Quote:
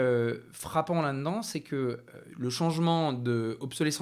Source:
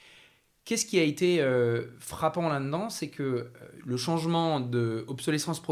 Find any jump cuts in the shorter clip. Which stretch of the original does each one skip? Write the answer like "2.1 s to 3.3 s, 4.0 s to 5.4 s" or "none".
none